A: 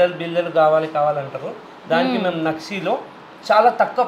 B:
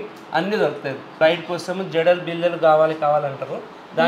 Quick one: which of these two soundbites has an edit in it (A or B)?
B